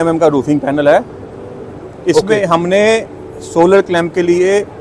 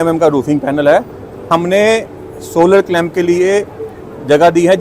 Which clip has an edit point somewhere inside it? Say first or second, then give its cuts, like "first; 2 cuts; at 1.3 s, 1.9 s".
second; 1 cut; at 1.5 s